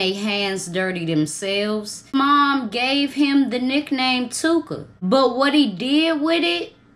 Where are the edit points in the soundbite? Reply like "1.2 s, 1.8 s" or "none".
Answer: 2.2 s